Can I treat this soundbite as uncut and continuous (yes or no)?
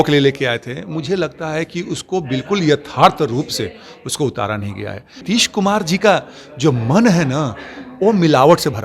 no